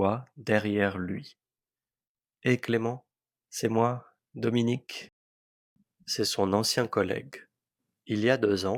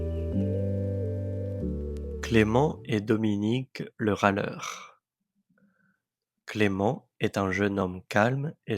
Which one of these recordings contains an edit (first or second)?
second